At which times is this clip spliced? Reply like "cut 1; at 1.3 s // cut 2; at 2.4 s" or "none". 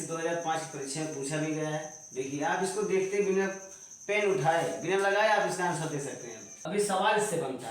cut 1; at 6.6 s